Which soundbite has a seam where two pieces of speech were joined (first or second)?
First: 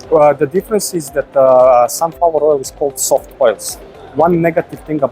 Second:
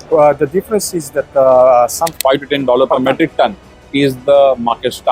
second